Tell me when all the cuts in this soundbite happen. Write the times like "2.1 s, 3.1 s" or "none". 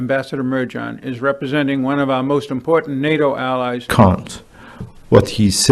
3.9 s

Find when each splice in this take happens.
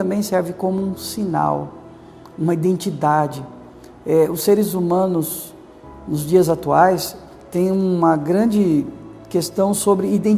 none

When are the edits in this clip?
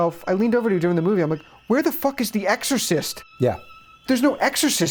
none

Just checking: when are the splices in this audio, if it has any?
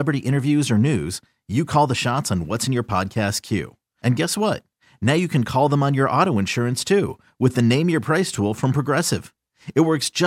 none

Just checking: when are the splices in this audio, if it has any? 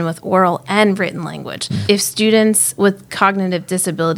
1.8 s

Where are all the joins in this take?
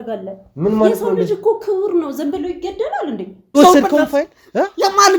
3.6 s

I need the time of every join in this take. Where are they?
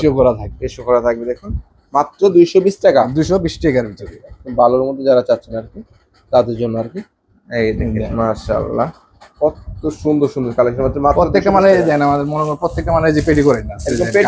none

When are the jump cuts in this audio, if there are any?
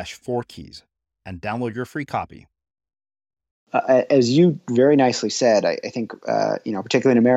3.7 s

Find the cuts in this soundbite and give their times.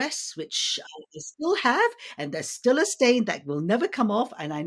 none

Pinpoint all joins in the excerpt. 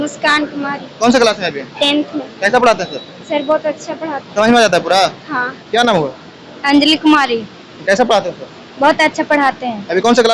5.2 s

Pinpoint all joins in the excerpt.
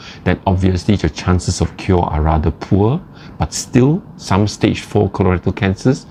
none

